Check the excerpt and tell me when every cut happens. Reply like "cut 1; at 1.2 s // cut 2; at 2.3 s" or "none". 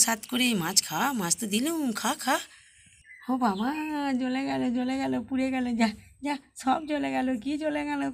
none